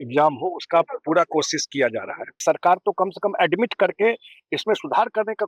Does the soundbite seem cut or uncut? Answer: cut